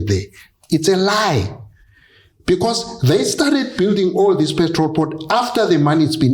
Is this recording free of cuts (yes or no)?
yes